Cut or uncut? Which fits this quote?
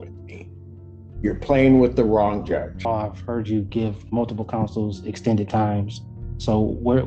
cut